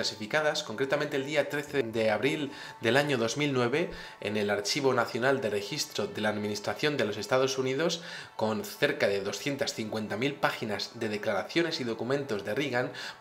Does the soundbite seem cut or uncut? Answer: cut